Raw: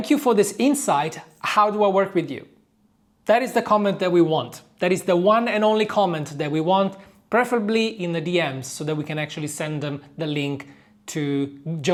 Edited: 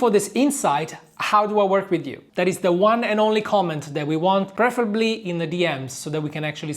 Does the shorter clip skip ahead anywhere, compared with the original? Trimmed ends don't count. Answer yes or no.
yes